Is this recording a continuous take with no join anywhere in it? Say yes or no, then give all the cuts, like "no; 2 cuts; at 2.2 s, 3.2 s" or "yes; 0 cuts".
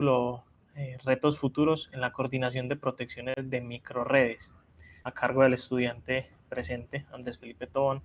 no; 1 cut; at 3.4 s